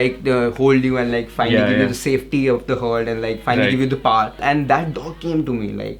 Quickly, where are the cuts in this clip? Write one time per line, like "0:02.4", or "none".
0:04.4